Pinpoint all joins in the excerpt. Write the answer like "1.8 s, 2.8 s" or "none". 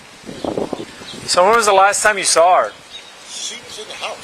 0.9 s

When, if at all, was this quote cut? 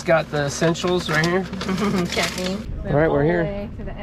2.7 s

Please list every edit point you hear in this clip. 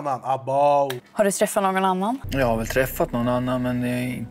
1.0 s, 2.2 s

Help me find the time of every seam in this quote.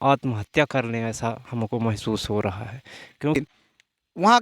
3.4 s

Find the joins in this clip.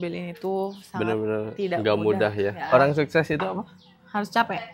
2.6 s

